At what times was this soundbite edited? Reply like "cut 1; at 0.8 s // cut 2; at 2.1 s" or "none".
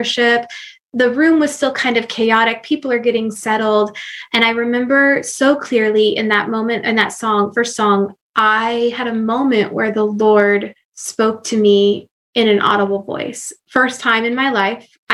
cut 1; at 8.2 s